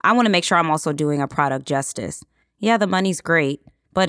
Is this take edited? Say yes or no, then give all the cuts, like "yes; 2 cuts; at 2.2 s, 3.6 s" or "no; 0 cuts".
no; 0 cuts